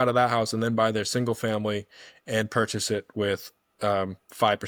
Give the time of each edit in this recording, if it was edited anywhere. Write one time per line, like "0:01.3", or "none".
none